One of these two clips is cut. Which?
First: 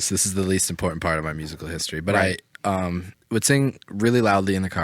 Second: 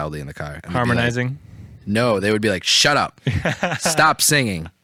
first; 1 cut; at 3.1 s

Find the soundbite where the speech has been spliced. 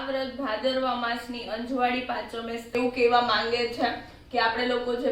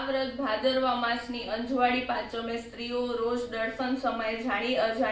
first; 1 cut; at 2.7 s

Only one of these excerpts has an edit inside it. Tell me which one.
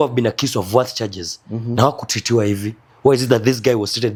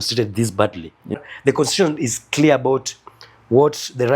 second; 1 cut; at 1.2 s

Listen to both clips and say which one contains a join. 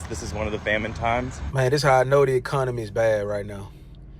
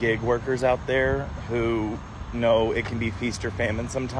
first; 1 cut; at 1.4 s

